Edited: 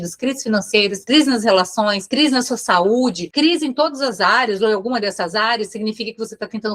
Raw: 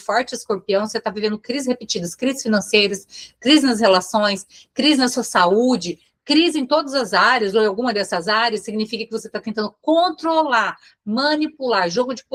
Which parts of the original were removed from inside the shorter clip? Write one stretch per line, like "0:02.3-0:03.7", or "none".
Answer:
0:03.0-0:03.4
0:04.4-0:04.7
0:05.9-0:06.2

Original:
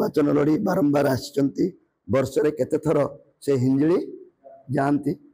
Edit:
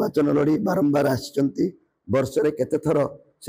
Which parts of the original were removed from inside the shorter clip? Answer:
none

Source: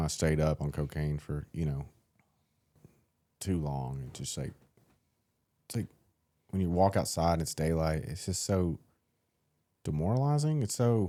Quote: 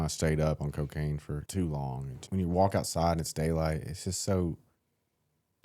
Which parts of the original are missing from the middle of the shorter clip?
0:01.5-0:03.4
0:04.1-0:06.4

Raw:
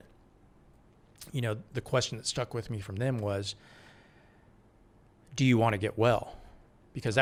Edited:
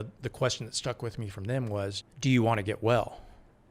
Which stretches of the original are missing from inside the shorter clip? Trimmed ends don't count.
0:03.6-0:05.2

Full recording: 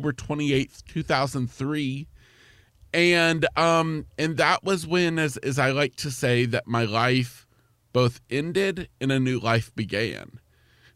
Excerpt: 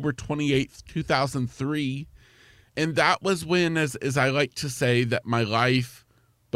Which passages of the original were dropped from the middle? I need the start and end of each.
0:02.6-0:04.0

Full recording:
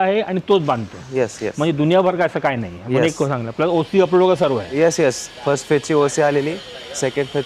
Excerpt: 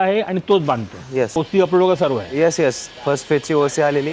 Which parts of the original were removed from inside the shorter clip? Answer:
0:01.3-0:03.7

